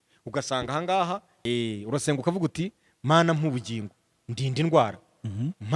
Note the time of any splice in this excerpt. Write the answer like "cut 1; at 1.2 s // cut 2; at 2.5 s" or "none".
cut 1; at 1.3 s